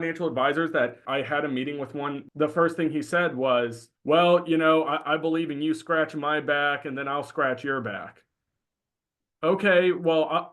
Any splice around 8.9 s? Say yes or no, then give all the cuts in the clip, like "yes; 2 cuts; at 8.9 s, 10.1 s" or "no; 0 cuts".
no; 3 cuts; at 1.0 s, 2.2 s, 3.9 s